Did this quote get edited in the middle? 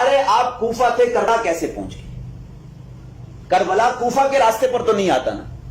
yes; 1 cut; at 1.3 s

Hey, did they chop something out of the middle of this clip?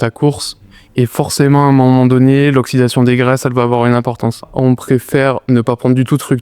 yes; 1 cut; at 4.5 s

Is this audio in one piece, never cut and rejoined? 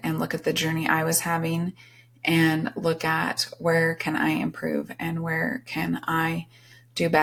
yes; 0 cuts

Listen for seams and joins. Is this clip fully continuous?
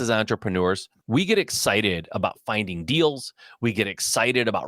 no; 1 cut; at 0.9 s

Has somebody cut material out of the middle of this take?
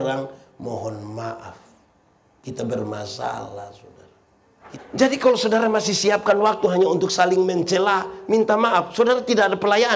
yes; 1 cut; at 4.6 s

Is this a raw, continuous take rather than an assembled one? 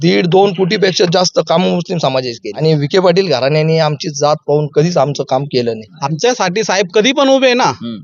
no; 2 cuts; at 2.6 s, 5.9 s

